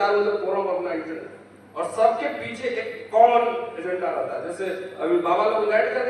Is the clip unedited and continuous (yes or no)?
yes